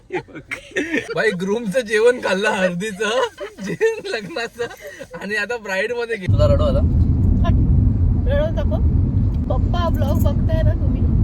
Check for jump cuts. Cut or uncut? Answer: cut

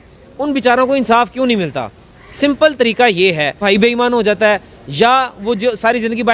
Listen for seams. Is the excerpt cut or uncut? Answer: cut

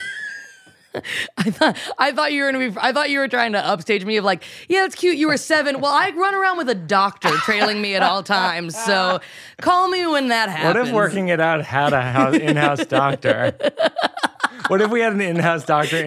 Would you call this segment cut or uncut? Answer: uncut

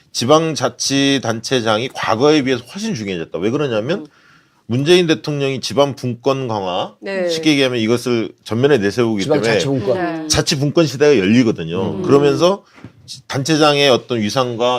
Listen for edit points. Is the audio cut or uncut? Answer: cut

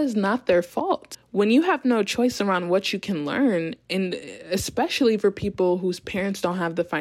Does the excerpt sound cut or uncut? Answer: uncut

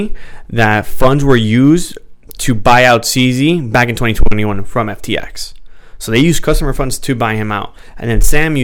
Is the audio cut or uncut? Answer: uncut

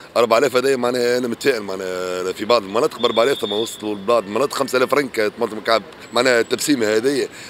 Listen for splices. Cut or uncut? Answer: cut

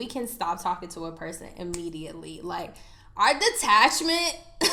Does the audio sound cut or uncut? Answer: uncut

